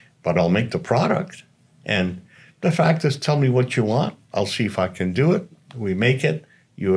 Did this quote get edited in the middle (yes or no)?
no